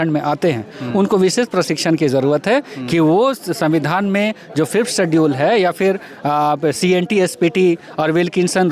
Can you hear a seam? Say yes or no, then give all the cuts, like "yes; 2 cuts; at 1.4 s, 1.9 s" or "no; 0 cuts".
no; 0 cuts